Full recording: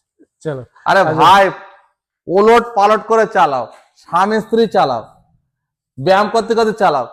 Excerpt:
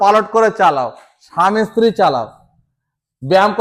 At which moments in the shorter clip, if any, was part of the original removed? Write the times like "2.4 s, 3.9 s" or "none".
none